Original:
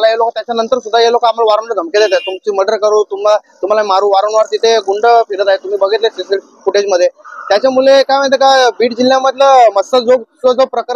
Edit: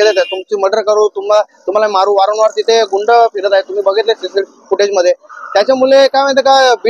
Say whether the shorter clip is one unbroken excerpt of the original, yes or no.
yes